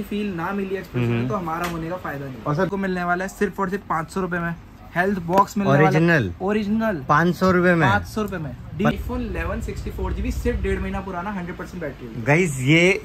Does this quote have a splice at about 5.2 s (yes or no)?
no